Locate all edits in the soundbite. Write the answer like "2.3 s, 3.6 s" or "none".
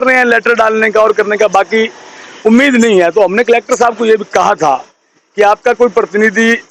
none